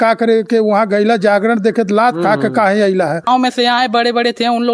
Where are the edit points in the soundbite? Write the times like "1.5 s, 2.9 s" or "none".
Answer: 3.3 s